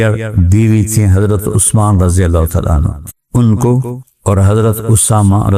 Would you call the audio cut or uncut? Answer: uncut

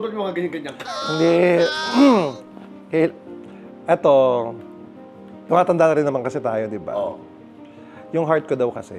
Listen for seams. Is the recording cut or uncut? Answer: uncut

